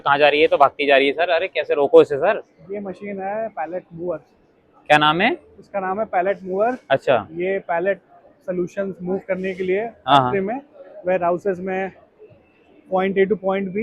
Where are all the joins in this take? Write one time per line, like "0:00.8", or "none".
none

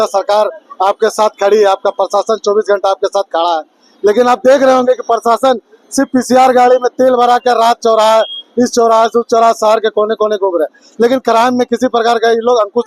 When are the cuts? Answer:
none

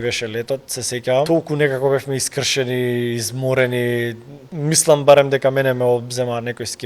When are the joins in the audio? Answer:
0:01.3
0:04.5

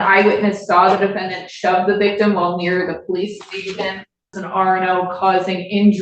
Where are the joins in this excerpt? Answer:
0:04.4

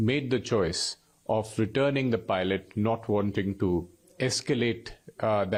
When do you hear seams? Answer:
none

